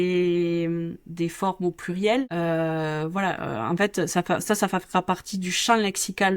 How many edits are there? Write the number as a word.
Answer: one